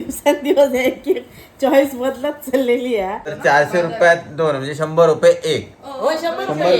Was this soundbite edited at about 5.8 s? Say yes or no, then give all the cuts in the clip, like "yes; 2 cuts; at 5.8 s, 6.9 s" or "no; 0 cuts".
no; 1 cut; at 3.3 s